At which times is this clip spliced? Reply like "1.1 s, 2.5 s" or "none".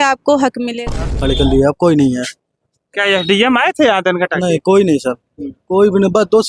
1.0 s